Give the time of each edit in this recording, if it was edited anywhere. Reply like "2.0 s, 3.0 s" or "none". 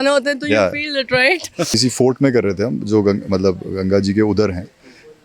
1.8 s